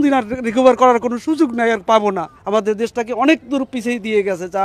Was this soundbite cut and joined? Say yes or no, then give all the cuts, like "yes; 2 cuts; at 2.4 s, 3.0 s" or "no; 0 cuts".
yes; 1 cut; at 2.3 s